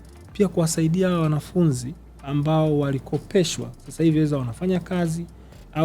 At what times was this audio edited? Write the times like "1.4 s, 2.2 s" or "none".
none